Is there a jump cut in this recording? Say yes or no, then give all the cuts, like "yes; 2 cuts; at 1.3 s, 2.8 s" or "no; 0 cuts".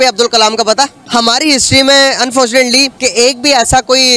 yes; 1 cut; at 1.0 s